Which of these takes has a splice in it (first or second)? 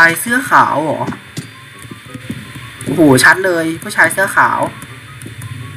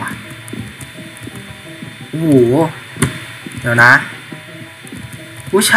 first